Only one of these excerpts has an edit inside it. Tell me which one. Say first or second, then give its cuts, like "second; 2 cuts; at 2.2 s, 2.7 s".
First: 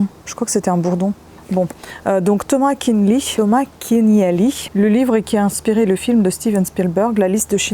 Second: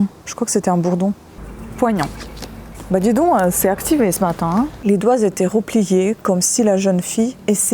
second; 2 cuts; at 1.4 s, 4.8 s